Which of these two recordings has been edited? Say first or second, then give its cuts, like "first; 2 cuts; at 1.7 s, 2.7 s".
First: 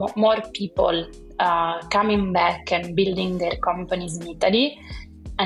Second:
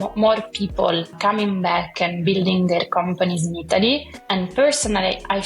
second; 2 cuts; at 1.1 s, 4.1 s